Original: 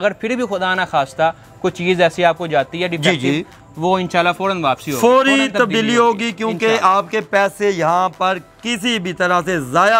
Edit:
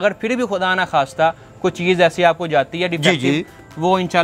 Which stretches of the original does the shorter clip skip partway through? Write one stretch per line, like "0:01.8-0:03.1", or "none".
none